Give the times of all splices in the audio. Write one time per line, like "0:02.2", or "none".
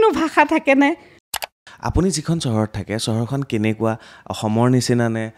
0:01.3